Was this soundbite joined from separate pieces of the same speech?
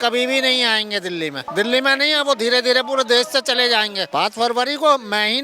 yes; 2 cuts; at 1.5 s, 4.0 s

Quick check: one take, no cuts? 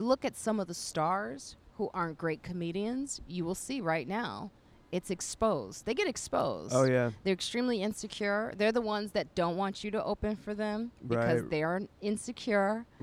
yes; 0 cuts

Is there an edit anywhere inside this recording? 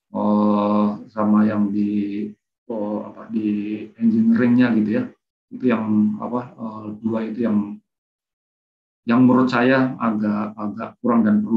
no; 0 cuts

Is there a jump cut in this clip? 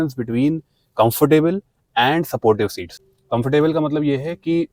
no; 0 cuts

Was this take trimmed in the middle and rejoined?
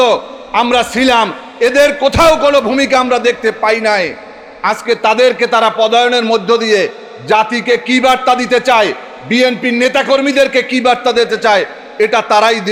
no; 0 cuts

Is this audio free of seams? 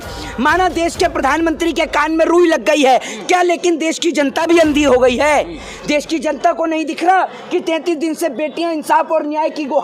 yes; 0 cuts

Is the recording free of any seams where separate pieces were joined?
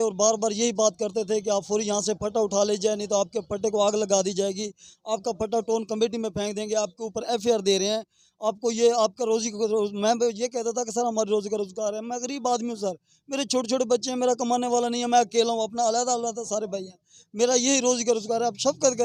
yes; 0 cuts

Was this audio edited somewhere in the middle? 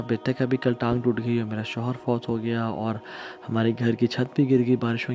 no; 0 cuts

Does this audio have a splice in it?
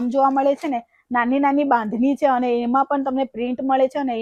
no; 0 cuts

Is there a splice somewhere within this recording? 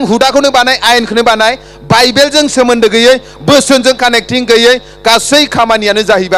no; 0 cuts

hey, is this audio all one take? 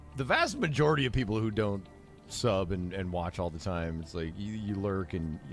yes; 0 cuts

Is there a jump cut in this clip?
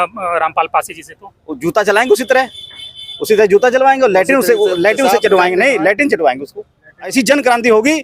yes; 1 cut; at 7.1 s

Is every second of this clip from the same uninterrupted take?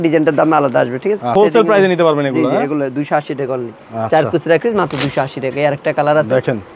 no; 1 cut; at 1.3 s

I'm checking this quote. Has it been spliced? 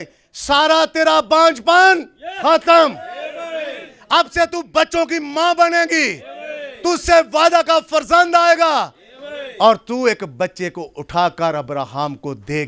no; 0 cuts

